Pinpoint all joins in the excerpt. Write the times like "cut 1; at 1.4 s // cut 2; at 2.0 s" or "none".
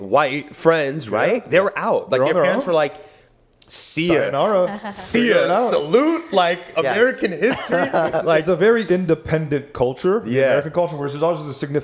none